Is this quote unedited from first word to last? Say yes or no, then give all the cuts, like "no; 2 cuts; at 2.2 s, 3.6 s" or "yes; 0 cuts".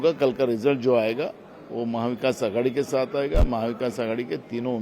yes; 0 cuts